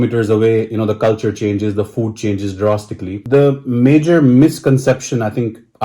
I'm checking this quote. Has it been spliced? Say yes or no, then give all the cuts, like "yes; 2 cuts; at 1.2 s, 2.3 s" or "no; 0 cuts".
yes; 1 cut; at 3.2 s